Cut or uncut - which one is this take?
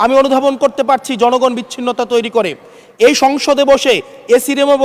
uncut